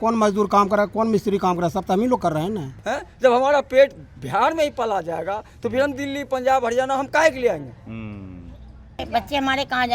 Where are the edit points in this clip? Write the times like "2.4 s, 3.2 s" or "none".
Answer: 2.7 s, 9.0 s